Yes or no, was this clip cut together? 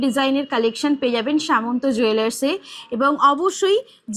no